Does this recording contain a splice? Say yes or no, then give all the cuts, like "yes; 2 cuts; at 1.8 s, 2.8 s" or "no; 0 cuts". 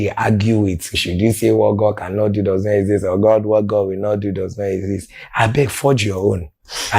yes; 2 cuts; at 1.0 s, 5.3 s